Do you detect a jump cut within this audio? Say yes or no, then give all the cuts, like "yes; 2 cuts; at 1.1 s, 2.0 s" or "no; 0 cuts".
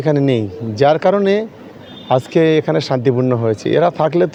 no; 0 cuts